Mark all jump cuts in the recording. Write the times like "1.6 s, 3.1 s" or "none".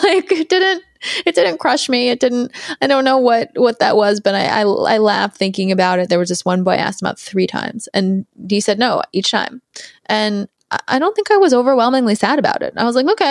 none